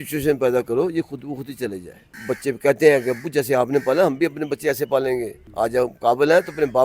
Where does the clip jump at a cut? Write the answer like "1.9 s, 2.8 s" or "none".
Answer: 2.1 s, 5.4 s